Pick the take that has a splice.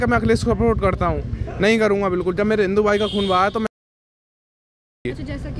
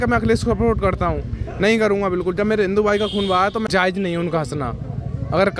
second; 1 cut; at 3.7 s

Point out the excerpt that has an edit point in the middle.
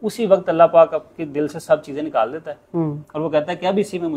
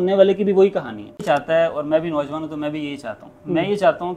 second; 1 cut; at 1.2 s

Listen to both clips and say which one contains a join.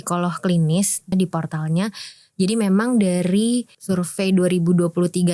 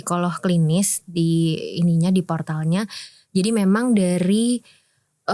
first; 2 cuts; at 1.1 s, 3.7 s

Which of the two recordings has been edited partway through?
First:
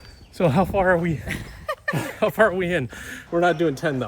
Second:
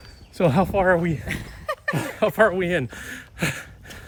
first; 1 cut; at 3.2 s

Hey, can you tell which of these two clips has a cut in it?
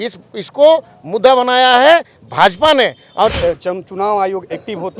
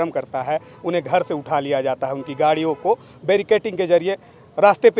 first; 1 cut; at 3.4 s

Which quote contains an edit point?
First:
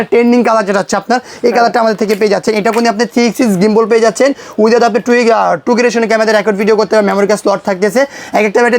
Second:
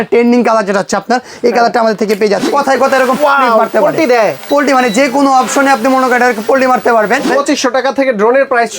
second; 2 cuts; at 2.5 s, 7.3 s

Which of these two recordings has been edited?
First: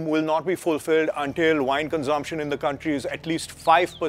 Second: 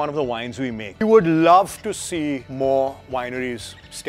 second; 2 cuts; at 1.0 s, 2.5 s

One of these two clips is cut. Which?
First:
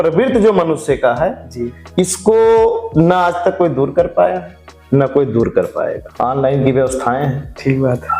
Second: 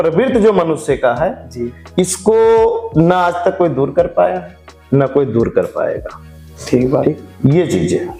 first; 1 cut; at 6.0 s

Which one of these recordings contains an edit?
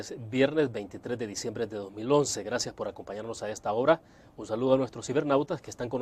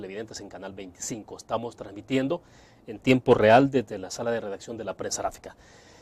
first; 1 cut; at 3.0 s

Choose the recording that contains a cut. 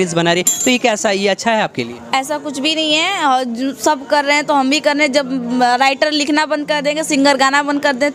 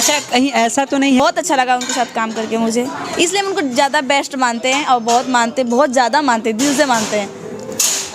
second; 1 cut; at 1.2 s

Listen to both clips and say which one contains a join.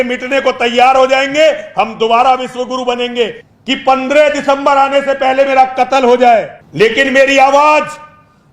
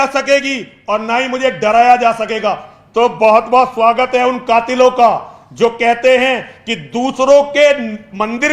first; 2 cuts; at 3.4 s, 6.6 s

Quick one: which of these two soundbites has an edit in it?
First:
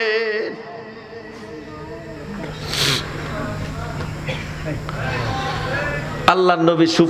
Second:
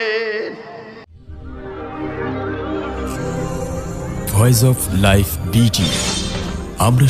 second; 1 cut; at 1.2 s

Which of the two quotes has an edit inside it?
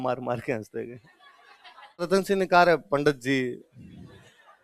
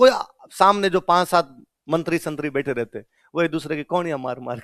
first; 1 cut; at 2.1 s

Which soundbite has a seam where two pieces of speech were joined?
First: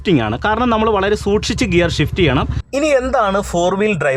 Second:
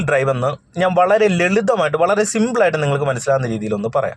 first; 1 cut; at 2.6 s

